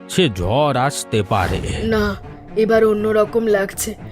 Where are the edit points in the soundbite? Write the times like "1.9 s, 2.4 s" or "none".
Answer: 1.7 s